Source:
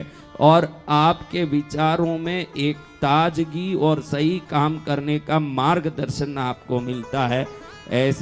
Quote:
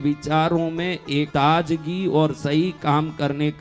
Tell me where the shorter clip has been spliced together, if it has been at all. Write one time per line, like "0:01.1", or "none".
0:01.3